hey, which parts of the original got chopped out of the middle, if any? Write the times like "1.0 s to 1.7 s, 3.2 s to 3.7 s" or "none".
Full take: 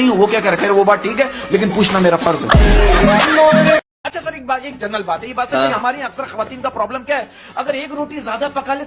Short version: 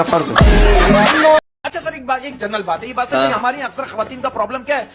3.5 s to 3.8 s